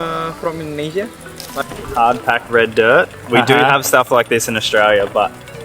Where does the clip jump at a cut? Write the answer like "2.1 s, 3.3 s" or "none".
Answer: 1.5 s